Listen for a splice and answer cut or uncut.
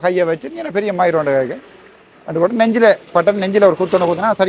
uncut